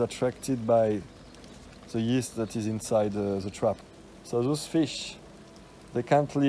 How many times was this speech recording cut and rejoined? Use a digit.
1